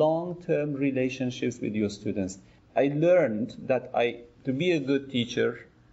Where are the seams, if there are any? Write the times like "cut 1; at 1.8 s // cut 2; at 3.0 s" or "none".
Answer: cut 1; at 2.5 s